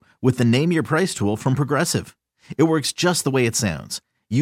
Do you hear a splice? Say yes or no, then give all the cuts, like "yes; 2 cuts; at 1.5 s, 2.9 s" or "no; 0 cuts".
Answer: no; 0 cuts